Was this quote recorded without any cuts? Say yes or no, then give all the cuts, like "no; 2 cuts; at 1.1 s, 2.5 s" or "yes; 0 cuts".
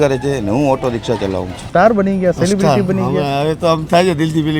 no; 1 cut; at 1.6 s